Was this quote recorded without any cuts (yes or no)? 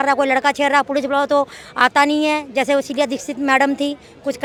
yes